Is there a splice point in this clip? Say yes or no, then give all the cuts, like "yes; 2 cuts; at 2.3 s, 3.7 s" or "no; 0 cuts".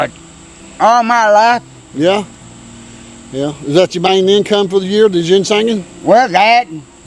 no; 0 cuts